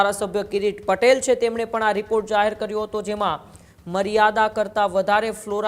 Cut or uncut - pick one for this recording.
uncut